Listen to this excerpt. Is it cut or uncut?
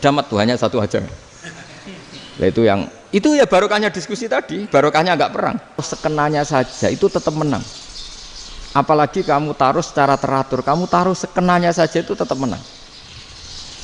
cut